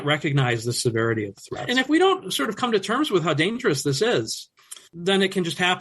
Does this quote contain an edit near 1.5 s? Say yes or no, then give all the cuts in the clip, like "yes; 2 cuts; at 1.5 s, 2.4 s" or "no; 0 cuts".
yes; 1 cut; at 1.5 s